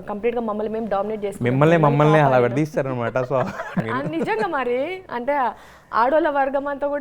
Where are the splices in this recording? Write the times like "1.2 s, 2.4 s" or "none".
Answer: 3.8 s